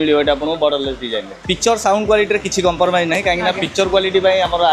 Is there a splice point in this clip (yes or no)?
yes